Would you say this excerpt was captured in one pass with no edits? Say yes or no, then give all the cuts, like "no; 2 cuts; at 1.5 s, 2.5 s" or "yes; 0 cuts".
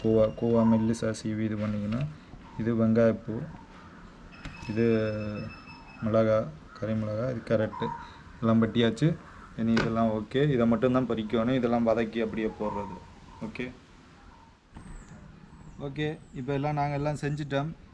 yes; 0 cuts